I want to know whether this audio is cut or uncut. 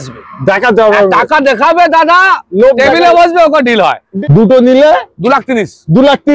cut